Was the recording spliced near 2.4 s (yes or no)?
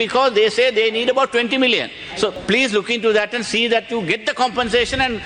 yes